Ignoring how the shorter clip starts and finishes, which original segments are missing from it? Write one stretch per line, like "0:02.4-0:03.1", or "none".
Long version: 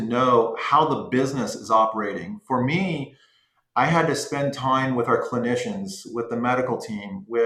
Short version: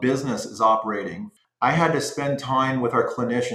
0:02.3-0:03.4